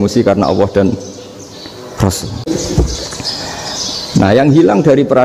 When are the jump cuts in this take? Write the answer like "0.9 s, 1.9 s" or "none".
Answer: 2.4 s